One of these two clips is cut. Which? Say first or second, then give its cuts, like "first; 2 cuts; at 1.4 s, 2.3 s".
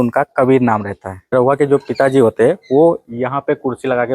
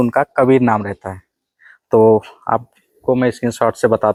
first; 1 cut; at 1.3 s